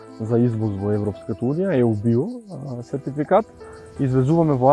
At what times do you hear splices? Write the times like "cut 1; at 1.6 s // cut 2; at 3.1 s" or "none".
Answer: none